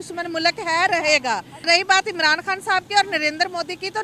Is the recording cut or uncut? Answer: cut